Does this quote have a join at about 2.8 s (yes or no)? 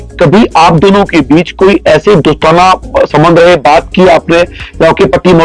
no